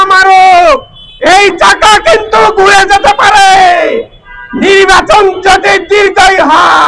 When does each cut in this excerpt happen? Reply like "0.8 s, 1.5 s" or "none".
none